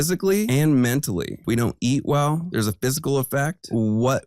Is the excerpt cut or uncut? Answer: cut